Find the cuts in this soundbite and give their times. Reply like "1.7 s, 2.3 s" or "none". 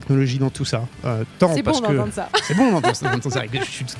none